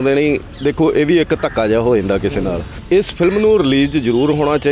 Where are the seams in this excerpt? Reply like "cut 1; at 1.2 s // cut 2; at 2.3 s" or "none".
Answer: cut 1; at 2.7 s